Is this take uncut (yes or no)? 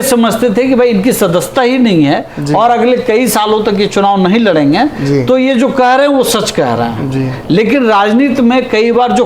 yes